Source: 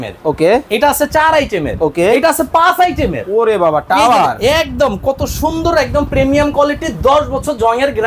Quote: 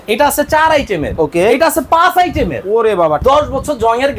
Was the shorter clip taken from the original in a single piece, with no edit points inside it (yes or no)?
no